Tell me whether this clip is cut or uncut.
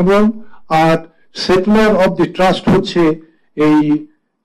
uncut